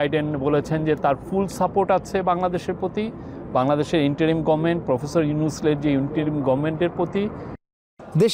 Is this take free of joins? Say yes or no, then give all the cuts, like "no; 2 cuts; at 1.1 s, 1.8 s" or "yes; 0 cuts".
yes; 0 cuts